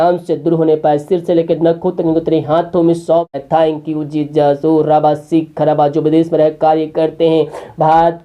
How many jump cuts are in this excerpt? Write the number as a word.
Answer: one